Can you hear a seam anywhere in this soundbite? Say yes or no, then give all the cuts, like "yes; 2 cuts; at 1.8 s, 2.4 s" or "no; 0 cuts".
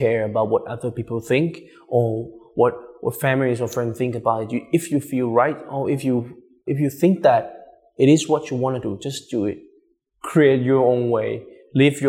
yes; 1 cut; at 6.5 s